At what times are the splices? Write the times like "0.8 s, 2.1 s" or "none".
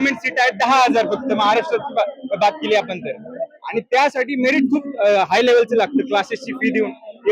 none